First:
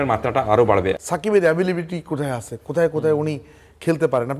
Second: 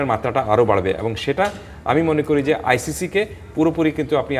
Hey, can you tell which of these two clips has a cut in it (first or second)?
first